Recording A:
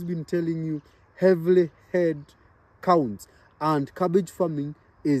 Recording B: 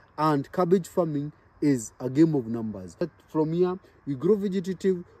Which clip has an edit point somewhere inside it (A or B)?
B